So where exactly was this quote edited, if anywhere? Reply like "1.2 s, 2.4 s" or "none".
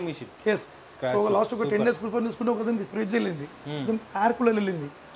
none

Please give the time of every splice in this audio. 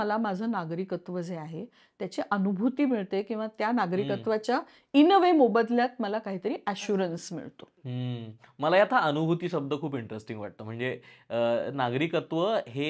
none

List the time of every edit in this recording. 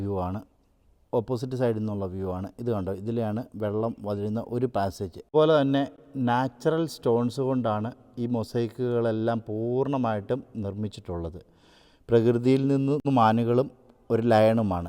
5.1 s, 13.0 s

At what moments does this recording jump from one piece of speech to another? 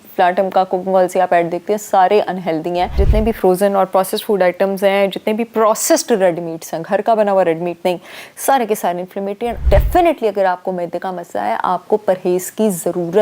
3.0 s, 9.6 s

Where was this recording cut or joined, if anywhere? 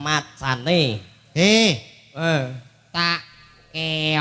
none

